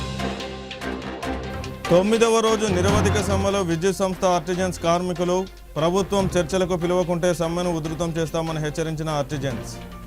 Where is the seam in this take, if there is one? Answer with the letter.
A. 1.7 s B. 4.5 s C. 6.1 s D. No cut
D